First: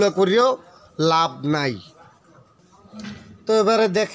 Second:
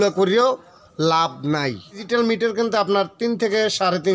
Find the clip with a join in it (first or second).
second